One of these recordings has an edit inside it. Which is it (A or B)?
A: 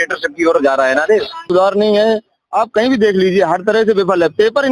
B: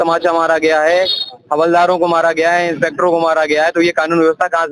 A